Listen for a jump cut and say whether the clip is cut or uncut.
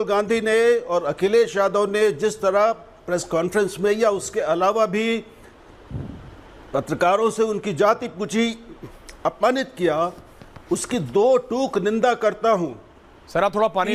uncut